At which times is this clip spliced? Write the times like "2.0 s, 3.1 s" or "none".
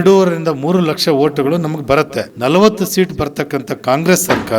2.2 s